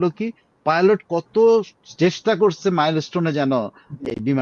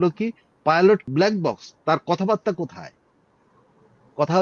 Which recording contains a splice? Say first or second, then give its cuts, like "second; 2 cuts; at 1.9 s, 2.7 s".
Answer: second; 1 cut; at 1.1 s